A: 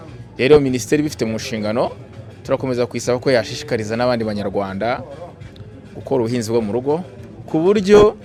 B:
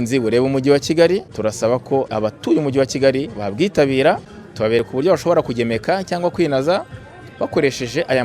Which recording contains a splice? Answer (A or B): B